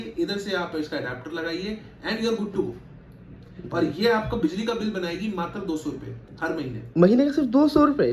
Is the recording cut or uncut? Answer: uncut